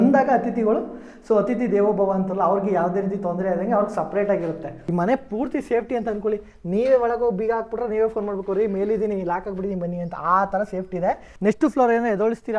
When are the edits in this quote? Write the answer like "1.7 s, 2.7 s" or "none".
4.7 s, 11.3 s